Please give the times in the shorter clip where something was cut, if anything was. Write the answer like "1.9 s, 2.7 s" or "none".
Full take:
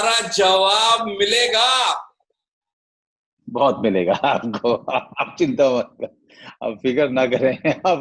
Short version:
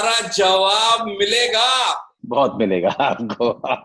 2.1 s